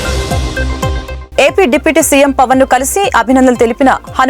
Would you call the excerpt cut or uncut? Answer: cut